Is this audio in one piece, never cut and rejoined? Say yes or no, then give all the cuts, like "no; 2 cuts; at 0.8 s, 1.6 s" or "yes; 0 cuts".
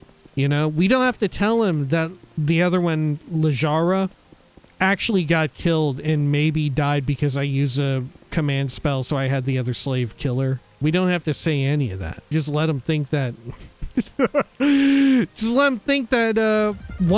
no; 2 cuts; at 10.8 s, 12.3 s